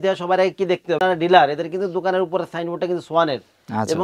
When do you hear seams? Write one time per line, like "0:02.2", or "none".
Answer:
0:01.0

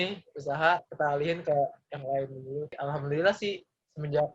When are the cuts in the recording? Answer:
0:02.7

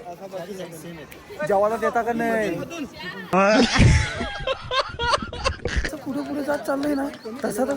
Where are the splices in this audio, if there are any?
0:05.9

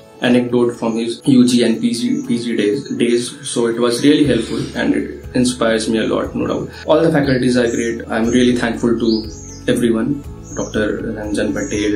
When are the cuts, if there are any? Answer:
0:01.2
0:06.7
0:08.1

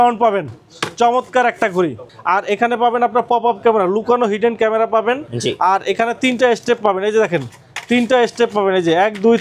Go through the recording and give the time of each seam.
0:02.1

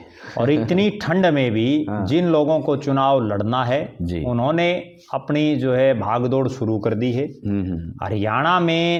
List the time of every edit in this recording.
none

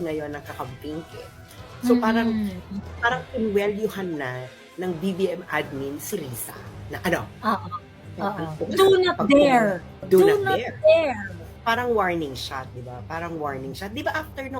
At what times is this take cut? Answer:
0:08.6
0:10.0
0:11.5

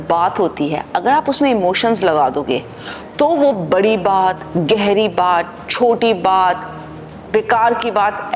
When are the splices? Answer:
none

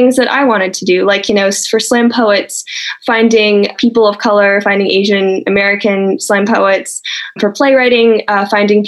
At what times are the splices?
0:02.9
0:03.8
0:07.4

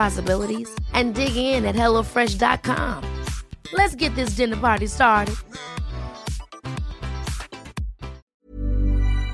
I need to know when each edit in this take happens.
0:08.3

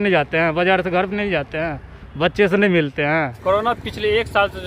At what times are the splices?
0:03.3

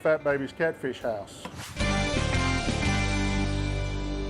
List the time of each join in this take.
0:01.6

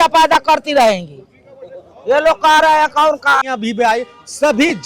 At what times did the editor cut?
0:03.5

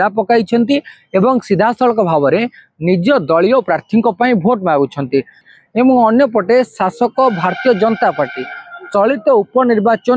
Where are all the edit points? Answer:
0:05.4

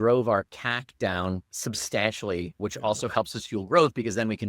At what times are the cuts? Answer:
0:01.5
0:02.5

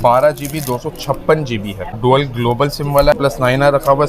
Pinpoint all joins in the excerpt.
0:01.8
0:03.2

